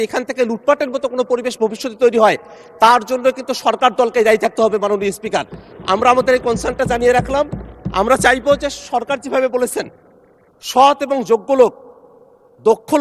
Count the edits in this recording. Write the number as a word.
zero